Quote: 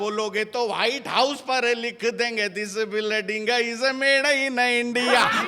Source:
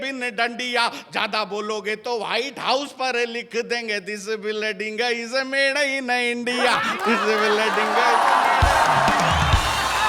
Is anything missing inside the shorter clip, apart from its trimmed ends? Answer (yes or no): no